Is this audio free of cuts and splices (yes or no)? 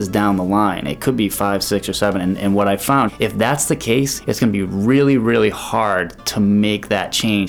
no